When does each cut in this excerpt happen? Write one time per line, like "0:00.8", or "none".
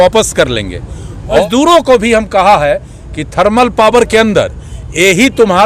0:01.4